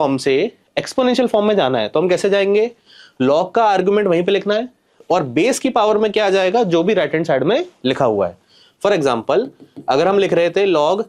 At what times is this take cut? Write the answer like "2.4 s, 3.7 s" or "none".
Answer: none